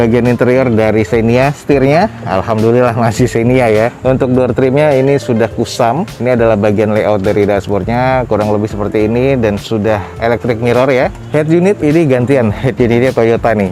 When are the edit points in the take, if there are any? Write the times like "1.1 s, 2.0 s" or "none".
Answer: none